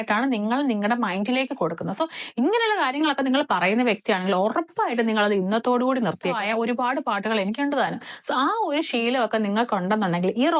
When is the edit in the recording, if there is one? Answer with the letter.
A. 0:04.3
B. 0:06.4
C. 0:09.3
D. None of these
B